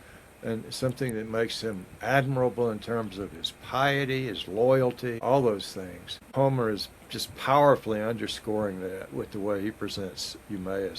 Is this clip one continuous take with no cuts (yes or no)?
no